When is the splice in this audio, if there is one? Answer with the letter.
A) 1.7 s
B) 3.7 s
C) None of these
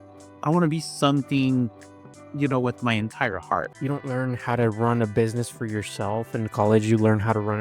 B